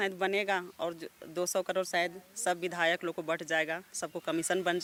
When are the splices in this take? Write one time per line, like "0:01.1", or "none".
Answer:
none